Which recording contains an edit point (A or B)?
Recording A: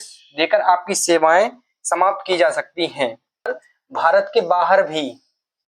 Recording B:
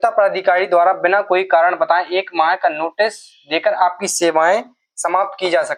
A